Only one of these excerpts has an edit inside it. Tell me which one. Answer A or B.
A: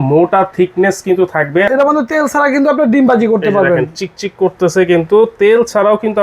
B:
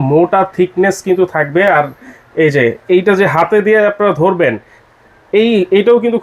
A